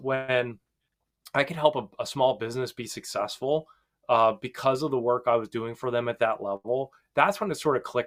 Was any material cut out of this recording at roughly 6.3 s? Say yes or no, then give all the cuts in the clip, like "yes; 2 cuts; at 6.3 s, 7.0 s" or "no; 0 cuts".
no; 0 cuts